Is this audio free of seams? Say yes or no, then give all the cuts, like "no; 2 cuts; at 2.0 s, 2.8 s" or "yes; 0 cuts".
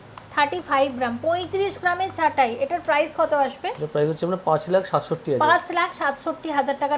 yes; 0 cuts